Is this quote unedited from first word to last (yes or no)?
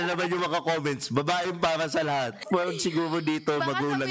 no